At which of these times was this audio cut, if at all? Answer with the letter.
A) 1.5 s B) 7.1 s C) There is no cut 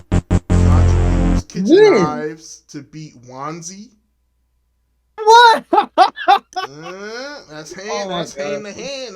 A